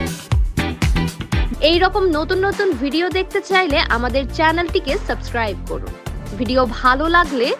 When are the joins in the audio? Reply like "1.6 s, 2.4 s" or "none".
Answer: 1.5 s